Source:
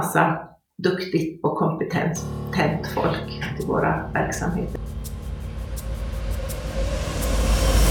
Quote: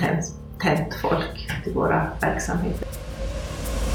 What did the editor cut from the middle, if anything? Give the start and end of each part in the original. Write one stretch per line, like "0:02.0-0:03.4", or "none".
0:04.8-0:06.4